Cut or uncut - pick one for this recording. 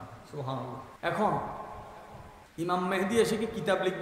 cut